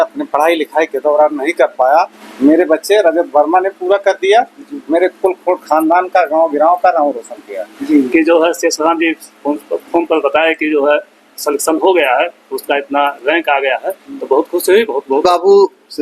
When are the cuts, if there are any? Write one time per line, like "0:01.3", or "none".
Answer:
0:02.2
0:07.8
0:15.2